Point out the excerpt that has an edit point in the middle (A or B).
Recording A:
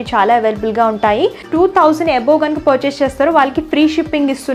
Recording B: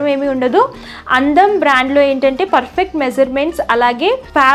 A